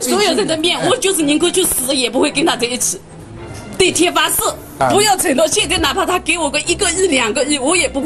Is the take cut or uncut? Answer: cut